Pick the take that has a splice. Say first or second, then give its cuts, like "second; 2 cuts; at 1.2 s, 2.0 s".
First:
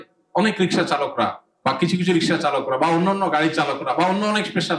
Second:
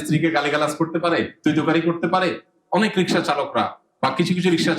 second; 1 cut; at 1.3 s